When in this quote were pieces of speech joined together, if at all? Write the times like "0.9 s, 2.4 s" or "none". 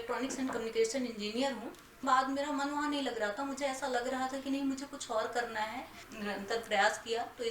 2.0 s, 6.1 s